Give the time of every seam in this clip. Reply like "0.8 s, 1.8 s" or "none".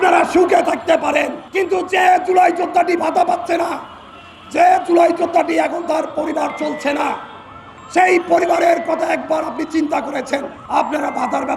1.4 s, 10.5 s